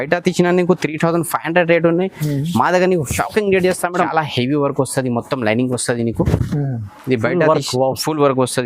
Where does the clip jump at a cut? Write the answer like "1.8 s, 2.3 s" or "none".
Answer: 3.9 s